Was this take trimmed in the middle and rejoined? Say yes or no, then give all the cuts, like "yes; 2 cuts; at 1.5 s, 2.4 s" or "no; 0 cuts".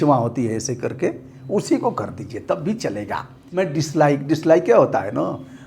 yes; 1 cut; at 3.4 s